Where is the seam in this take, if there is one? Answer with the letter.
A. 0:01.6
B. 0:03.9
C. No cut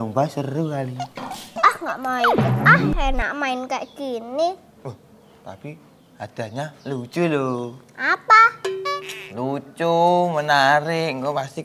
A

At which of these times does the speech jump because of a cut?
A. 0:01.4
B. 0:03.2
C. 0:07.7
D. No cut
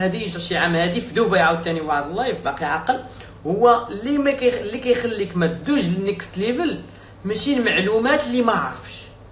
D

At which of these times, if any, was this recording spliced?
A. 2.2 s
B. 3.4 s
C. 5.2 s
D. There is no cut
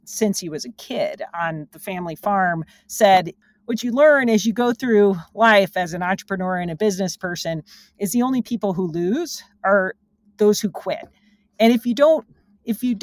B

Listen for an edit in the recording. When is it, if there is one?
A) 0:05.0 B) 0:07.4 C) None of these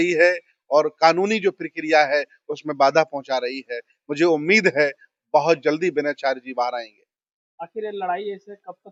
C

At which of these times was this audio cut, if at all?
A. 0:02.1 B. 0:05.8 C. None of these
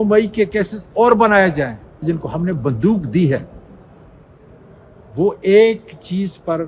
A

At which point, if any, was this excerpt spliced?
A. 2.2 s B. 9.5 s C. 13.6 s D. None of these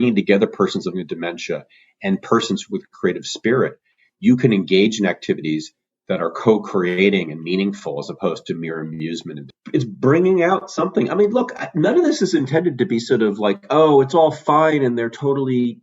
B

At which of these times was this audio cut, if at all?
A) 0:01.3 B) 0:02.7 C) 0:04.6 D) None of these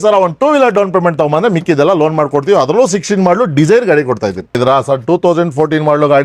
C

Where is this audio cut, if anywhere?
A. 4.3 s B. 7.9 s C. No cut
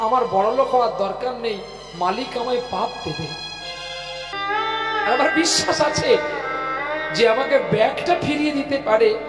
A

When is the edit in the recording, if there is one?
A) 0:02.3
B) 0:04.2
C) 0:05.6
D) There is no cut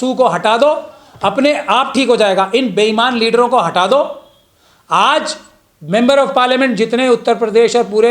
D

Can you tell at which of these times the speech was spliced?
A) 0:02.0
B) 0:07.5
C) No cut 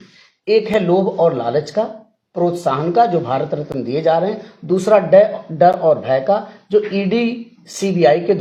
C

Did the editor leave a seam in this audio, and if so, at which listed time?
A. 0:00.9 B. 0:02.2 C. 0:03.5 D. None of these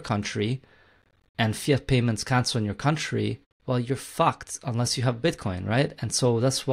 C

